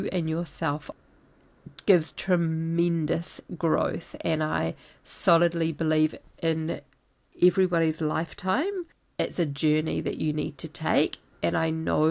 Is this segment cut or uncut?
cut